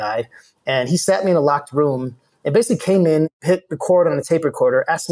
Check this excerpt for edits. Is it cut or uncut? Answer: cut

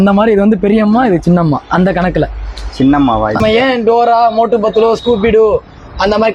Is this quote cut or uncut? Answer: cut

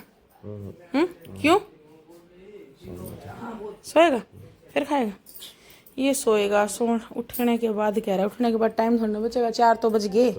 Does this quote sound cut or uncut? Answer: uncut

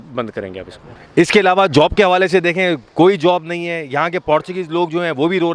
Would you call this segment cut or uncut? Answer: cut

